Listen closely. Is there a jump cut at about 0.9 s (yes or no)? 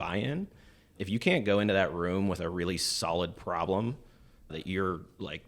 yes